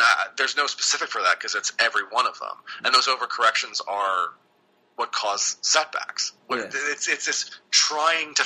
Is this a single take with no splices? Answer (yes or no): yes